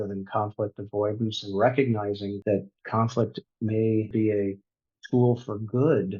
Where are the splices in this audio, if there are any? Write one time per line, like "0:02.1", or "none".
0:02.3
0:04.1